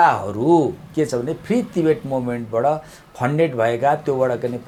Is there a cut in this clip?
no; 0 cuts

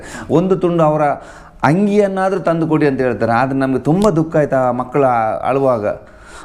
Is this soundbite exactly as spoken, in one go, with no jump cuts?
yes; 0 cuts

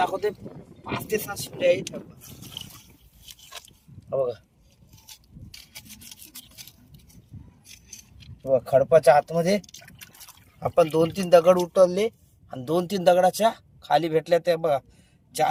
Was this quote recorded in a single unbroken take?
yes; 0 cuts

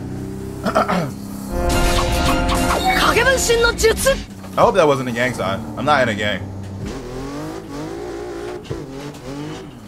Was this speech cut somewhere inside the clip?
no; 0 cuts

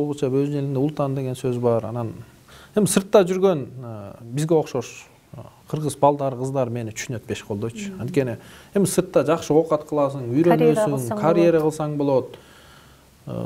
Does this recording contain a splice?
no; 0 cuts

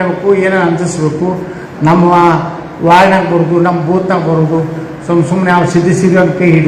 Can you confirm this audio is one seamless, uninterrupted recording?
yes; 0 cuts

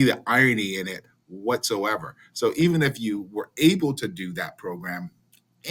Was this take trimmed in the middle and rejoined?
no; 0 cuts

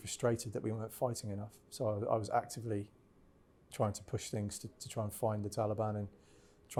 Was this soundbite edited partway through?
no; 0 cuts

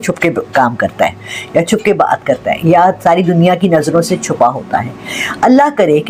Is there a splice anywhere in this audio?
no; 0 cuts

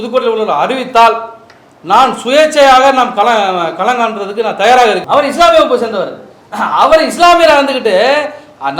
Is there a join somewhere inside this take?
yes; 1 cut; at 5.0 s

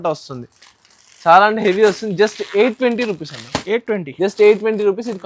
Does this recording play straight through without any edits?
yes; 0 cuts

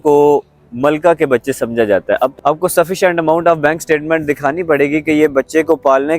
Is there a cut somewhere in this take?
yes; 1 cut; at 2.3 s

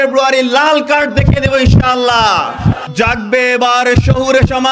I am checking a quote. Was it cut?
yes; 1 cut; at 2.8 s

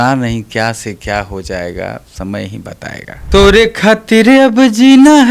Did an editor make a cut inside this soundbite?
yes; 1 cut; at 3.2 s

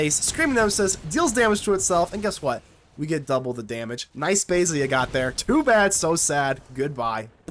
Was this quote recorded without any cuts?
yes; 0 cuts

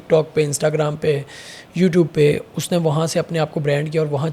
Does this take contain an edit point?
no; 0 cuts

